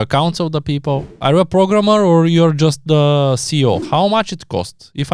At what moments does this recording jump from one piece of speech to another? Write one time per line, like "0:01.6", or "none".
0:01.1
0:03.8